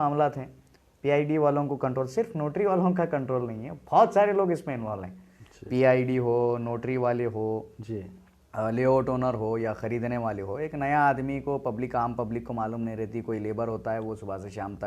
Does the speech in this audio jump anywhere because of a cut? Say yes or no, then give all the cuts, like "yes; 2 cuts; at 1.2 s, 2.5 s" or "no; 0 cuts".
no; 0 cuts